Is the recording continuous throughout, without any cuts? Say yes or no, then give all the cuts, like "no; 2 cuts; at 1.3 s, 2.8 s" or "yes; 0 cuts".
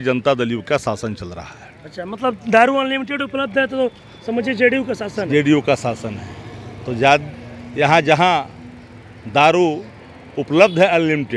yes; 0 cuts